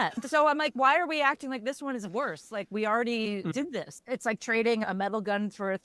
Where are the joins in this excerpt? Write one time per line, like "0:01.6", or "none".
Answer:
0:03.9
0:04.8